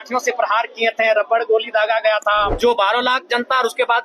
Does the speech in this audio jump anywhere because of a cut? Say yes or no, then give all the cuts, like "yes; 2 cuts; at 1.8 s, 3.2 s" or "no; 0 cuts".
yes; 1 cut; at 2.5 s